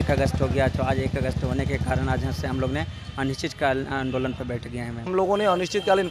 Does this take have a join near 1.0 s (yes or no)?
no